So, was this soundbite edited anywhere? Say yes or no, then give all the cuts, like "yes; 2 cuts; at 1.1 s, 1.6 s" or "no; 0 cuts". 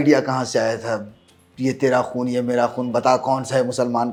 no; 0 cuts